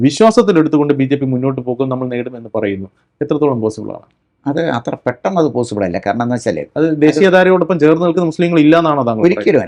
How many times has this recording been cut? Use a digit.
0